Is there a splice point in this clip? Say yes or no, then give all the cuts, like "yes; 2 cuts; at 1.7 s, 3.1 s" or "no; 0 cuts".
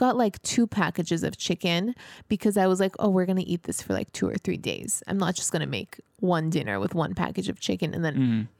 no; 0 cuts